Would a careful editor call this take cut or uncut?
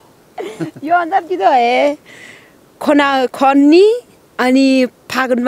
uncut